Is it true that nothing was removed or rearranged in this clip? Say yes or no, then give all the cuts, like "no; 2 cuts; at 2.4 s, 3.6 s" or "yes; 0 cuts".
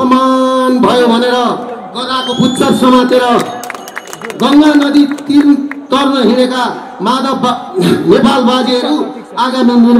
yes; 0 cuts